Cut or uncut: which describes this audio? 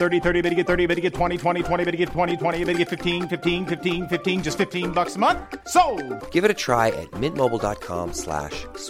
uncut